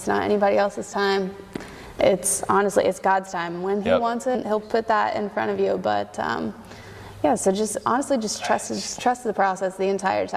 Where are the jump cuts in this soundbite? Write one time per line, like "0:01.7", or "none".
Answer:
0:04.4